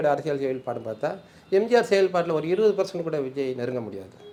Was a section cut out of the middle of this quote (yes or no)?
no